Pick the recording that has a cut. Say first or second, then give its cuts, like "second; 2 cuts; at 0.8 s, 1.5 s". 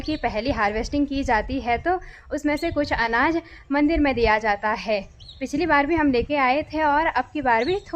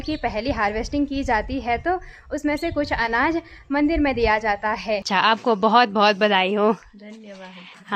second; 1 cut; at 5.3 s